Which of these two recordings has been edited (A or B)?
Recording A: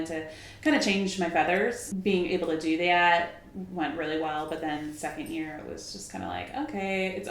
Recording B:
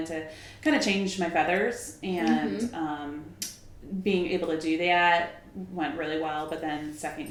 A